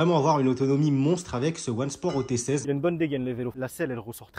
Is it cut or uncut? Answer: cut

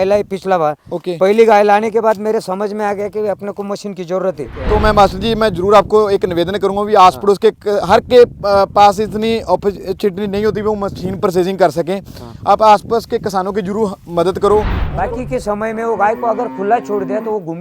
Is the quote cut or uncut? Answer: cut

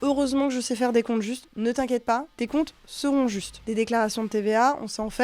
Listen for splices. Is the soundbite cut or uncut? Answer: cut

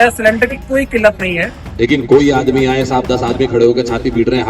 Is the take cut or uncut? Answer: cut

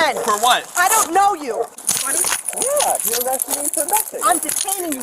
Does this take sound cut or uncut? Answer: cut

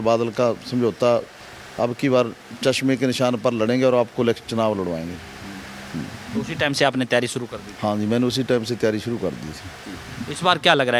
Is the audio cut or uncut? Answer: uncut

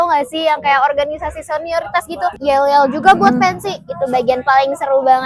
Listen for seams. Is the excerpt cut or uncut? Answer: cut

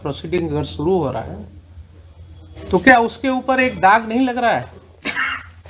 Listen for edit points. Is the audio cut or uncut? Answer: uncut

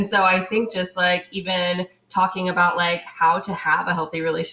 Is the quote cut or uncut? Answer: uncut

